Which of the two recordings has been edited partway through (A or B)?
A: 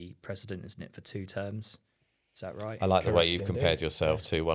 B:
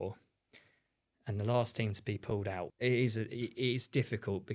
B